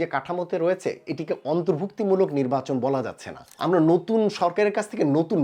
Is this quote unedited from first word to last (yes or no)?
no